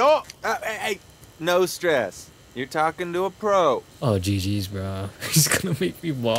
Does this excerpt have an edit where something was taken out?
yes; 1 cut; at 3.9 s

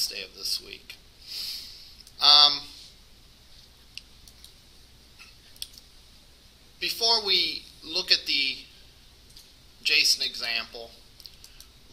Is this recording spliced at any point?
yes; 1 cut; at 7.7 s

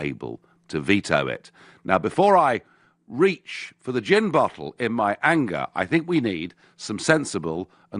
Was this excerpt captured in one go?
no; 1 cut; at 1.8 s

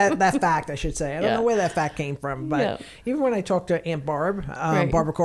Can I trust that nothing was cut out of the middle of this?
yes; 0 cuts

